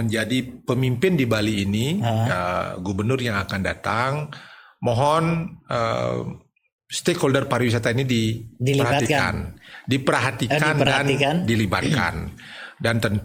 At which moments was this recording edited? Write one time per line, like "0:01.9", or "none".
none